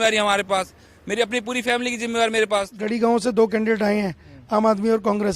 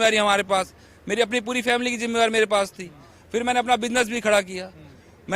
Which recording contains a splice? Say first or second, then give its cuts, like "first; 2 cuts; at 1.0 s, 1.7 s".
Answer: first; 1 cut; at 2.8 s